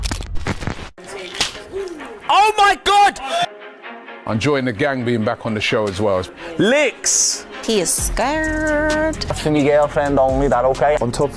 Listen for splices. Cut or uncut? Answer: cut